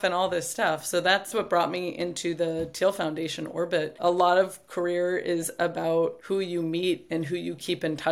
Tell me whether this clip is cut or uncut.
cut